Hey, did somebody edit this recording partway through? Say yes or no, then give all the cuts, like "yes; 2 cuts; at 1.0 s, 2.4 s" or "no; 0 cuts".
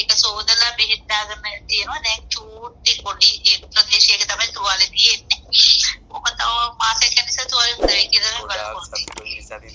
no; 0 cuts